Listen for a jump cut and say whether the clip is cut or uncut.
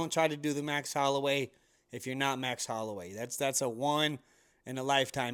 uncut